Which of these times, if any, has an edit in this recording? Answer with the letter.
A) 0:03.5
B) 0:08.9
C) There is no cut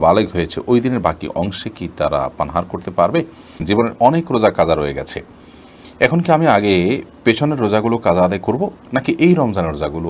A